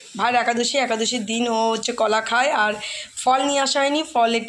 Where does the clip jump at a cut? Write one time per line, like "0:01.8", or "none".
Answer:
none